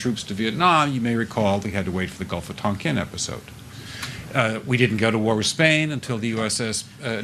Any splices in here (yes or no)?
yes